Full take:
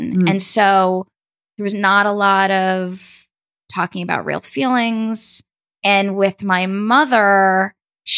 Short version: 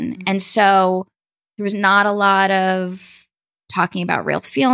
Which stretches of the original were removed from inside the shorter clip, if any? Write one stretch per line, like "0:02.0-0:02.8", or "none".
none